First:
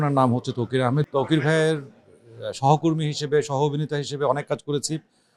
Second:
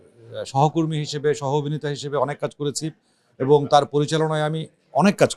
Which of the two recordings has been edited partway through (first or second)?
first